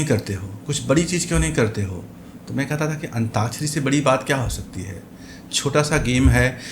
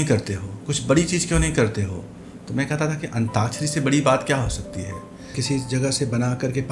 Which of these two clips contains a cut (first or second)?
second